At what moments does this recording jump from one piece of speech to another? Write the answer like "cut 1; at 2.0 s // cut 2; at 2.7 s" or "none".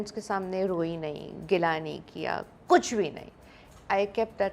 none